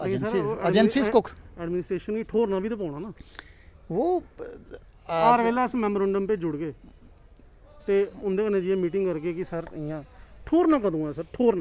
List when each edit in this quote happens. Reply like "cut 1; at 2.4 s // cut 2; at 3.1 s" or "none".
none